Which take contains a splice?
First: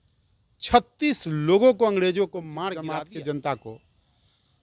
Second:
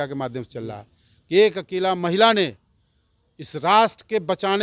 first; 1 cut; at 2.6 s

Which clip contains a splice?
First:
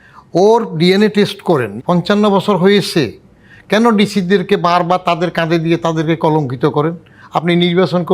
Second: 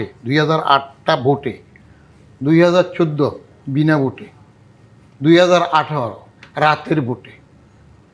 first; 1 cut; at 1.7 s

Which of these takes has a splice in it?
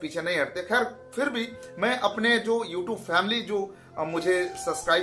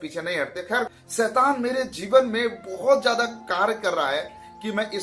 second; 1 cut; at 1.0 s

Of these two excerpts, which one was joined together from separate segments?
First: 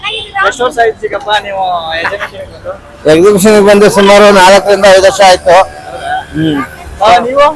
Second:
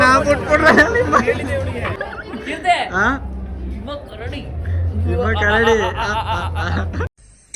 second; 1 cut; at 2.0 s

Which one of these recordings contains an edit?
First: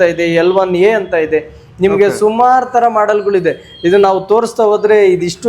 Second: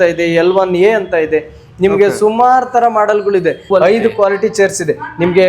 second; 1 cut; at 3.6 s

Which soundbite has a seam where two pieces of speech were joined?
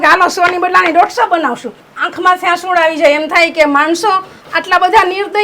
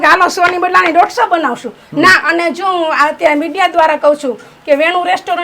first; 1 cut; at 1.8 s

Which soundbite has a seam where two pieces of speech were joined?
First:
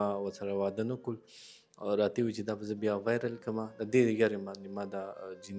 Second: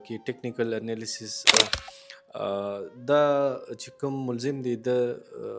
second; 1 cut; at 1.6 s

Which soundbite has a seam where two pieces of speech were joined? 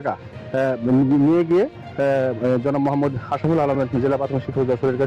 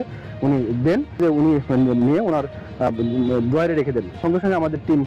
second; 2 cuts; at 1.2 s, 4.1 s

